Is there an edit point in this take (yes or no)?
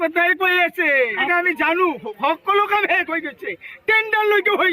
yes